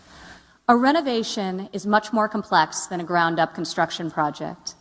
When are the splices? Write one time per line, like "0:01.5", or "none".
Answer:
0:02.5